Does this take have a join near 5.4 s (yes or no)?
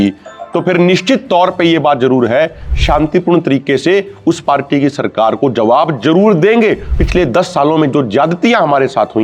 no